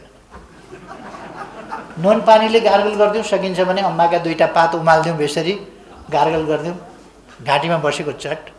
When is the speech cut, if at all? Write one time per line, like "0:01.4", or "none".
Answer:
0:01.9